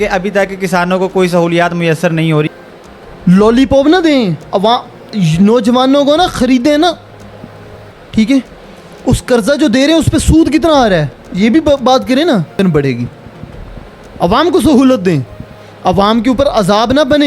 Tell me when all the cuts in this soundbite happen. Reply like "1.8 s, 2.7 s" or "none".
2.5 s, 12.6 s

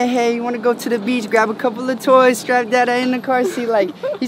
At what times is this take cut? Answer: none

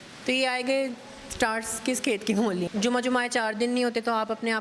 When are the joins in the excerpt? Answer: 2.7 s

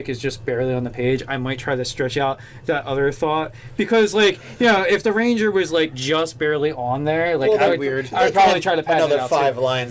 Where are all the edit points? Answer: 4.5 s

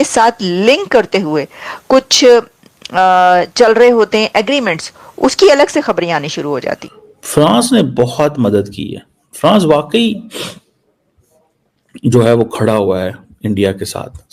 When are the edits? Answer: 7.1 s

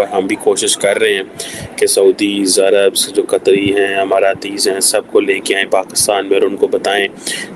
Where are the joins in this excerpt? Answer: none

